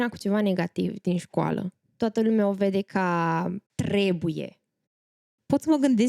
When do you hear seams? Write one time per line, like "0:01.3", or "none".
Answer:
0:01.8
0:03.7
0:05.1